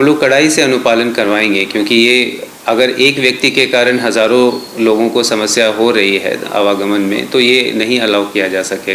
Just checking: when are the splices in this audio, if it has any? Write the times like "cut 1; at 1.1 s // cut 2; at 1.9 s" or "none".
none